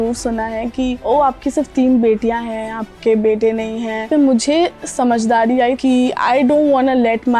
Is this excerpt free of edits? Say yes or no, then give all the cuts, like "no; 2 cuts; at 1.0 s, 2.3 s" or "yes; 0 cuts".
no; 3 cuts; at 1.0 s, 4.0 s, 5.8 s